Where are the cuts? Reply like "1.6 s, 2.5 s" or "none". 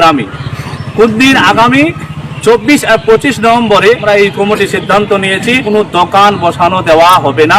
4.0 s, 5.7 s

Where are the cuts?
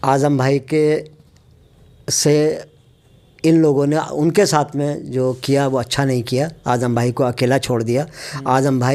none

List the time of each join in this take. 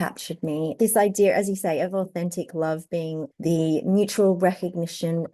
0.8 s, 3.3 s

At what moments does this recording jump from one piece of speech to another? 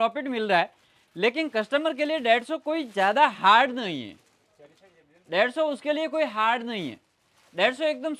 none

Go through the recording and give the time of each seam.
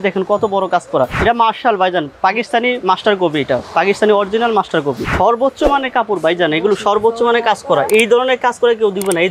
1.2 s, 5.1 s

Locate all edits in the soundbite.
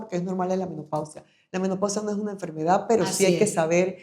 none

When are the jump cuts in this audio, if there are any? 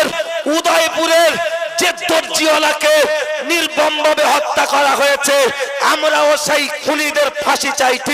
none

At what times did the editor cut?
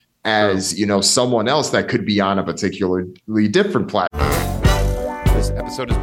4.1 s

